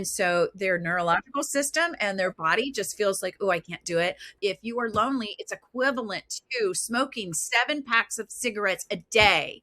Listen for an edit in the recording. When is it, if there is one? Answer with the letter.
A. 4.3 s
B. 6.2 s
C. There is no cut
A